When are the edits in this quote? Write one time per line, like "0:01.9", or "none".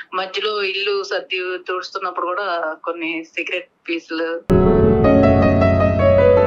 0:04.5